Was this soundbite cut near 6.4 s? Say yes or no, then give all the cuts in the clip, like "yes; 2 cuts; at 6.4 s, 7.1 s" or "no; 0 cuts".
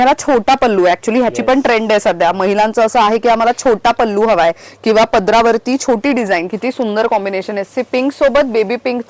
yes; 1 cut; at 6.4 s